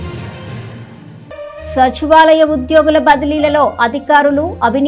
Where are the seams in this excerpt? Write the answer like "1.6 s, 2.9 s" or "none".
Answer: 1.5 s